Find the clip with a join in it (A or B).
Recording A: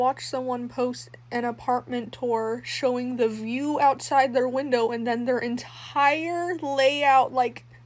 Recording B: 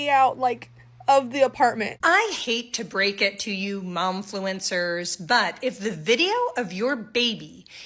B